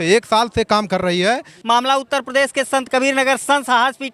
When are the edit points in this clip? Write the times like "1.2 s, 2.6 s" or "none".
1.5 s